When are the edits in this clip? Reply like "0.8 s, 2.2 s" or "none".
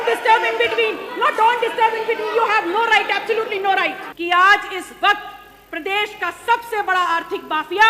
4.1 s